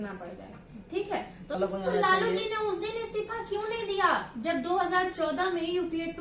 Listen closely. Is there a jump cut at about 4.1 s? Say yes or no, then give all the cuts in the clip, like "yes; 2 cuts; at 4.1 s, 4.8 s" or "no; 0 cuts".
no; 1 cut; at 1.5 s